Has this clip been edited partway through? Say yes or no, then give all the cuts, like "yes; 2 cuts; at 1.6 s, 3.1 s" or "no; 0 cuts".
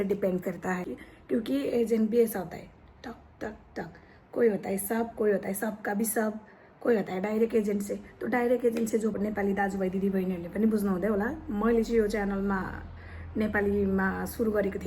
yes; 2 cuts; at 1.0 s, 9.2 s